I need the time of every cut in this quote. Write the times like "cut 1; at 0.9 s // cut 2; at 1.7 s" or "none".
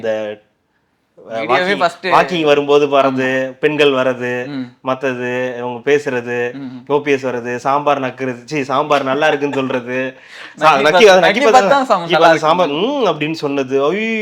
none